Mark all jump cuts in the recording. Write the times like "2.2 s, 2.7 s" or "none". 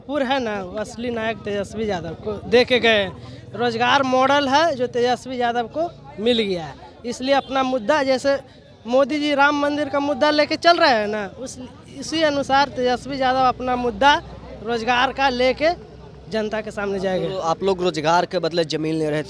none